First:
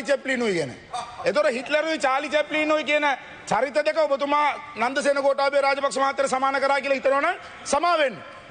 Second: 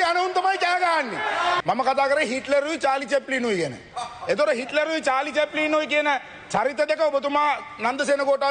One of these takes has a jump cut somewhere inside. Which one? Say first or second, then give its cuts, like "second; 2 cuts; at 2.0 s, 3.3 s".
second; 1 cut; at 1.6 s